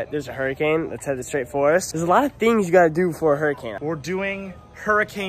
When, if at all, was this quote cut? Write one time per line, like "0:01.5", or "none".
0:01.9
0:03.7